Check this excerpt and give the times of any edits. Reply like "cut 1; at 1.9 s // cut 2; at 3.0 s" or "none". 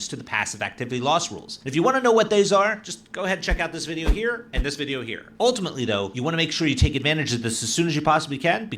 cut 1; at 5.6 s